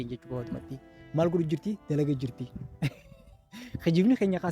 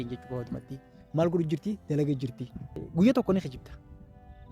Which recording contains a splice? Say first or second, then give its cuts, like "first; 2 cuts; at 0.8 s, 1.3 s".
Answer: second; 1 cut; at 2.7 s